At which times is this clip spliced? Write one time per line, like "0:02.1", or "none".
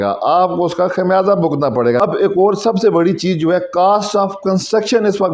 0:02.0